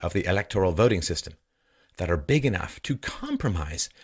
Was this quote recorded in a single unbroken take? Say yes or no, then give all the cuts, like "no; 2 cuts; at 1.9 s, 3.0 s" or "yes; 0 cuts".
no; 1 cut; at 2.6 s